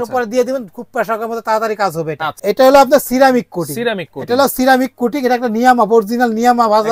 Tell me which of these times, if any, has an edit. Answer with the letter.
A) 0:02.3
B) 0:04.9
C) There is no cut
A